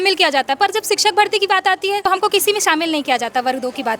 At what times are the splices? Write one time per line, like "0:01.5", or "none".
0:02.0

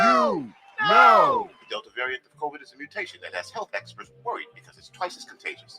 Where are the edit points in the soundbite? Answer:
0:01.5

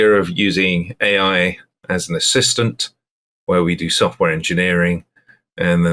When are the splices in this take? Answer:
none

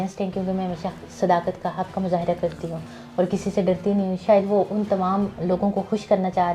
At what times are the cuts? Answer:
none

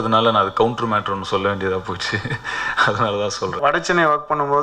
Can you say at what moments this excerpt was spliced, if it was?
0:03.6

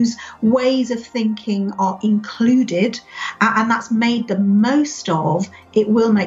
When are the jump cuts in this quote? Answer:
none

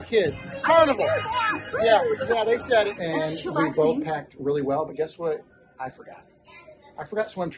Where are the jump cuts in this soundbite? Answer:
0:03.0

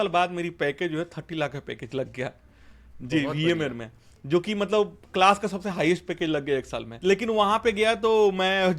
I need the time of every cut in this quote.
0:06.8

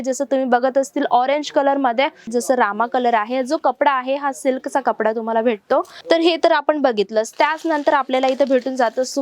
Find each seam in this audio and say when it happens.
0:02.3
0:05.9

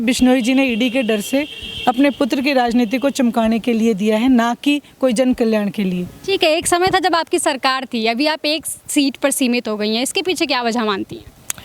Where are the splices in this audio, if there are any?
none

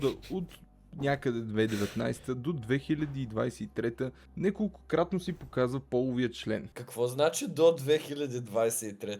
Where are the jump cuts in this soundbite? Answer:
0:06.7

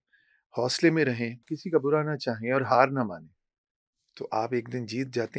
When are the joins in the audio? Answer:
0:01.5

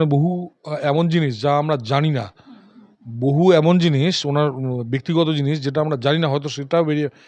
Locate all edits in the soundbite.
none

